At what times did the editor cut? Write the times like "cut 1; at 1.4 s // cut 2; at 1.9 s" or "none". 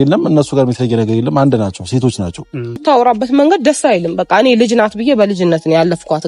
cut 1; at 2.8 s